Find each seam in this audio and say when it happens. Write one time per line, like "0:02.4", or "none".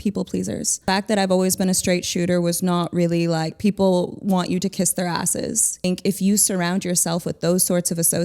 0:00.8
0:05.8